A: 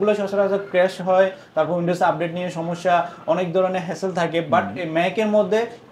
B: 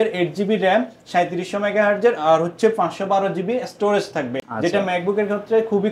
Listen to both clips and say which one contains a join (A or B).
B